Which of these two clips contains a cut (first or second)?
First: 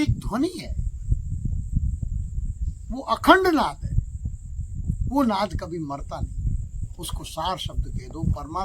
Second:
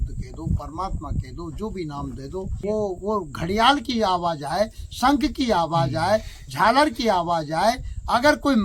second